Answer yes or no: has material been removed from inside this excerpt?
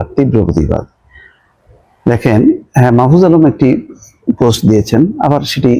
no